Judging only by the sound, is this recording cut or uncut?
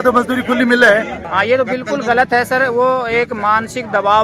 cut